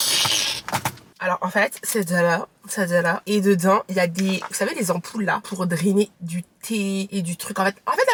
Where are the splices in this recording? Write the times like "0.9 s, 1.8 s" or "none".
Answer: none